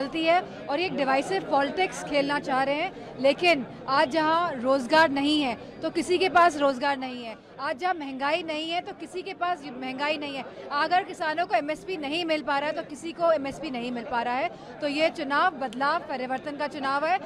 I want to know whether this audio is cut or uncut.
uncut